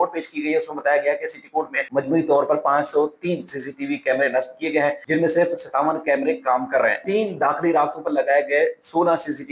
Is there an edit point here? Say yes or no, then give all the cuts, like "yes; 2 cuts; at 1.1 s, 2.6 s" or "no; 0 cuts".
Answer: yes; 3 cuts; at 1.8 s, 5.0 s, 7.0 s